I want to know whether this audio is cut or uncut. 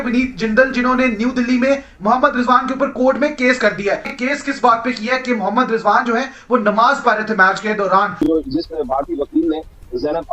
cut